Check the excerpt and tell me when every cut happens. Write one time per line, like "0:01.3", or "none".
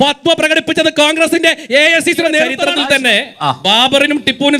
0:02.6